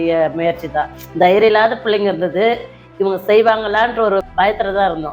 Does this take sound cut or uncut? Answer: cut